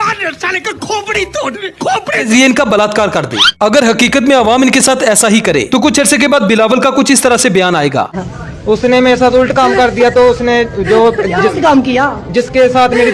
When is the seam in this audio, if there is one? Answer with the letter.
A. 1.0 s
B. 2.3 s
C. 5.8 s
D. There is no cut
B